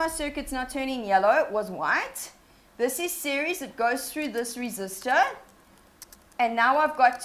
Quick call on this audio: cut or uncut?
uncut